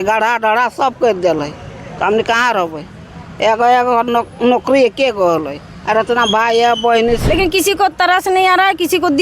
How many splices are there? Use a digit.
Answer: 1